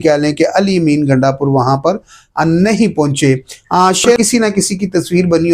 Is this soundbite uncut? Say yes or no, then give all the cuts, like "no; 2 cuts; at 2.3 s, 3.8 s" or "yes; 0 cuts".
no; 1 cut; at 4.2 s